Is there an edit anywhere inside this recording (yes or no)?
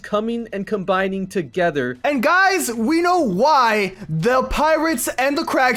no